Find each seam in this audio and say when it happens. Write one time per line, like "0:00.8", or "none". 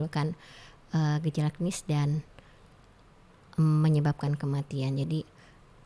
none